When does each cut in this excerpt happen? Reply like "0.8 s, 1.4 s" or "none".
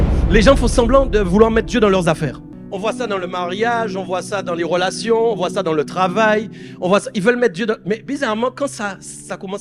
2.5 s

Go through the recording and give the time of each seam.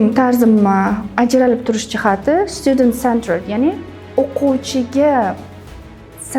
none

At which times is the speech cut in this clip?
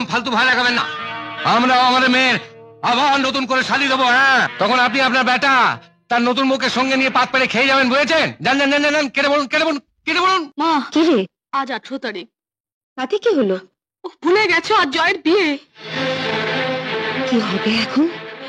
10.5 s

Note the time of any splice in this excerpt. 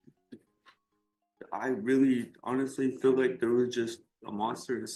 none

